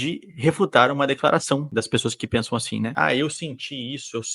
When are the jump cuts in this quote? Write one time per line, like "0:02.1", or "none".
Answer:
0:01.7
0:02.9